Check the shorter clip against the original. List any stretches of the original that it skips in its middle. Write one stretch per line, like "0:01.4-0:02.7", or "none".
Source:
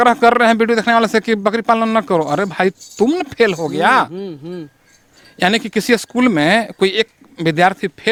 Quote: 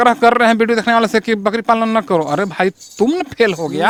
none